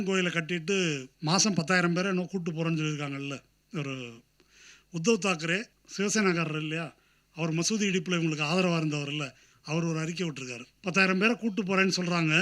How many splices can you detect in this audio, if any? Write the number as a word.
three